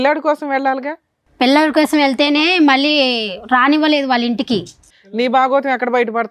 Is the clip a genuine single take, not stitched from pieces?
no; 1 cut; at 4.8 s

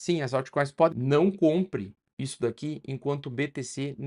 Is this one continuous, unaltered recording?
no; 1 cut; at 0.9 s

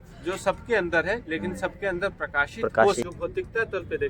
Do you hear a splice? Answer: yes; 1 cut; at 3.0 s

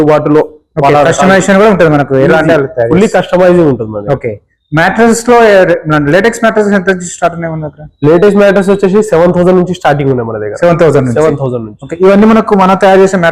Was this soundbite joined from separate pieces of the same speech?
no; 0 cuts

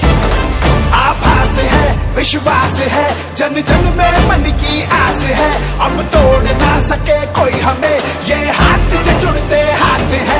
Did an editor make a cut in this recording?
no; 0 cuts

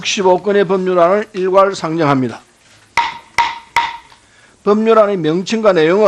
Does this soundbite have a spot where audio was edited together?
no; 0 cuts

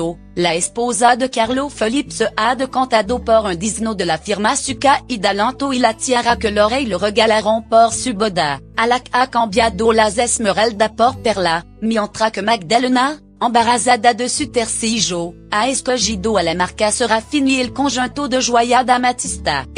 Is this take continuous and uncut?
yes; 0 cuts

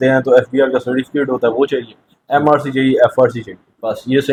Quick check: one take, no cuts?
yes; 0 cuts

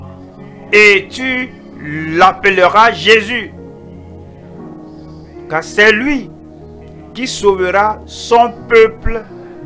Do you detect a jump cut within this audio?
no; 0 cuts

